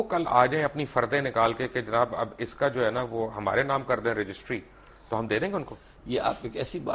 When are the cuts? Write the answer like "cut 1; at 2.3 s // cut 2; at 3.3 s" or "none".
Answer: none

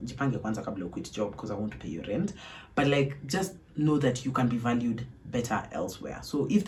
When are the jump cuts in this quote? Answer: none

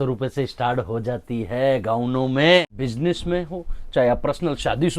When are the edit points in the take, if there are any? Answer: cut 1; at 2.6 s

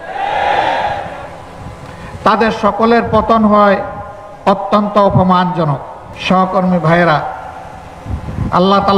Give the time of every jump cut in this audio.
none

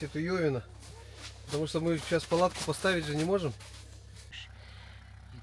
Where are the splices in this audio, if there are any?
cut 1; at 4.4 s

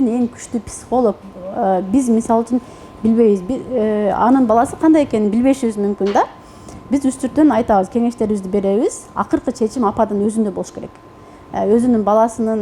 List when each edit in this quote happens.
none

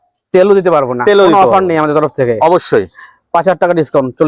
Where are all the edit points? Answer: none

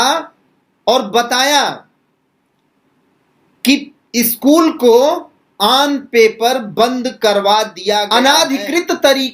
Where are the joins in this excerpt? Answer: cut 1; at 8.1 s

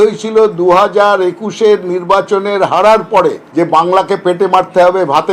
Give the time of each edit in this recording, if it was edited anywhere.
cut 1; at 3.4 s

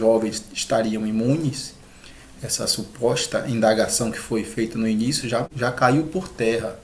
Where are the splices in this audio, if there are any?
cut 1; at 5.5 s

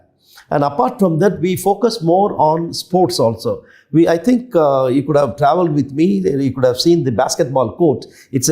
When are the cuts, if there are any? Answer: none

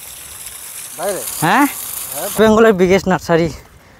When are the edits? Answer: cut 1; at 2.2 s

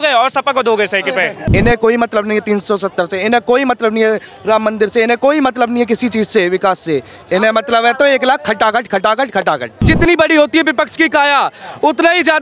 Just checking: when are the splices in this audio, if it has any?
cut 1; at 1.5 s // cut 2; at 9.8 s

